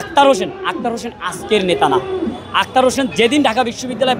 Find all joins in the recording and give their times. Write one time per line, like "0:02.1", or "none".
none